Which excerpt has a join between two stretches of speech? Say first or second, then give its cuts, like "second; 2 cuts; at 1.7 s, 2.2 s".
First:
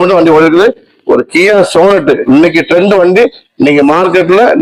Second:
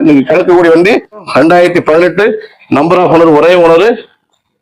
second; 1 cut; at 1.2 s